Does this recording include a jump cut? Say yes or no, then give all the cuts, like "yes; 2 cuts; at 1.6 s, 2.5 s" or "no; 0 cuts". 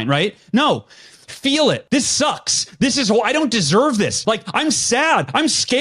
yes; 2 cuts; at 1.8 s, 4.2 s